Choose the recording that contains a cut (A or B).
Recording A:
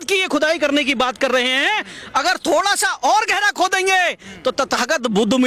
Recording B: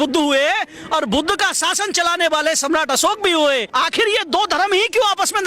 B